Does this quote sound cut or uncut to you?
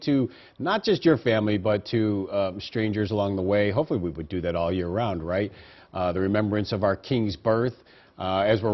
cut